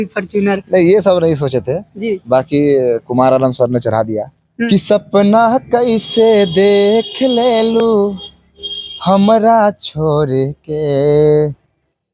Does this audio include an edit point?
yes; 1 cut; at 4.7 s

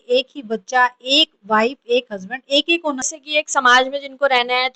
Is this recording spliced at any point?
yes; 1 cut; at 3.1 s

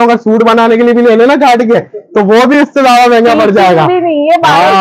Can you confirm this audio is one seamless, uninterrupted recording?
yes; 0 cuts

